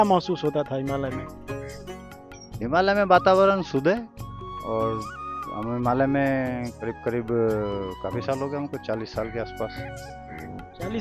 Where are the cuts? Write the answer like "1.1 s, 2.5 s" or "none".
1.2 s, 2.6 s, 6.7 s